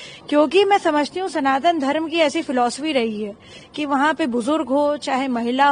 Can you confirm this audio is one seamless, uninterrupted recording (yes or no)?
yes